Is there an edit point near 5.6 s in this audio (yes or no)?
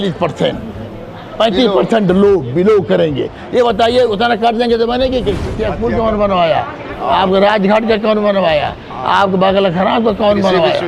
yes